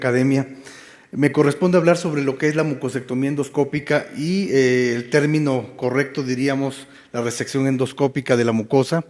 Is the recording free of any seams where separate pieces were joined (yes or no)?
yes